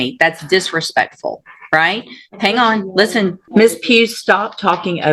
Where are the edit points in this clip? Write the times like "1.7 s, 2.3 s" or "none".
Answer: 3.4 s